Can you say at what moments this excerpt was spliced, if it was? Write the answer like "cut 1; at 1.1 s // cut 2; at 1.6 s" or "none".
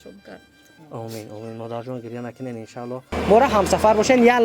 cut 1; at 3.1 s